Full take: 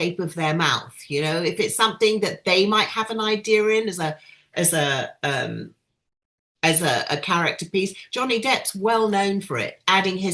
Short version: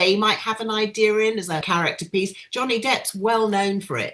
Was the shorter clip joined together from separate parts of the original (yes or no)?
yes